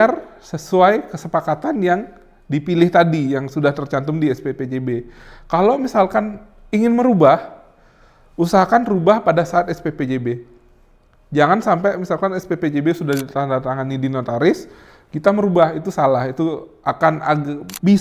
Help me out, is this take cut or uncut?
uncut